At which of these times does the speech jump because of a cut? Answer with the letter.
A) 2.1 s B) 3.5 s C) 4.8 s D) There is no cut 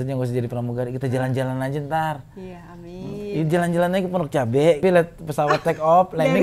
C